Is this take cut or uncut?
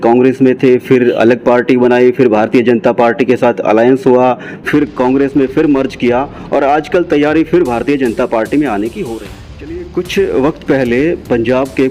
cut